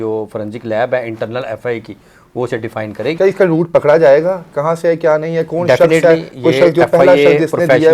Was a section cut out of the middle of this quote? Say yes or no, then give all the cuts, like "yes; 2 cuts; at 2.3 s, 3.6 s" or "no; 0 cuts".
yes; 1 cut; at 3.2 s